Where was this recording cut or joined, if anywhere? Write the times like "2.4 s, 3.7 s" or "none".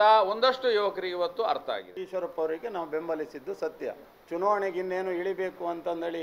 1.9 s, 4.1 s